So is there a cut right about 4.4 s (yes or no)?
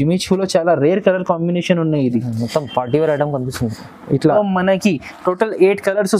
yes